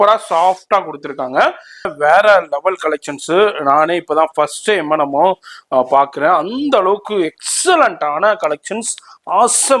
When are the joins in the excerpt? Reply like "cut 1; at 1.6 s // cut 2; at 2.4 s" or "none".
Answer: cut 1; at 1.9 s